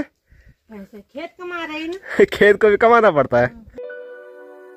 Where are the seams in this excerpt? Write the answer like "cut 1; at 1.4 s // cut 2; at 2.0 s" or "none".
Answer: cut 1; at 3.6 s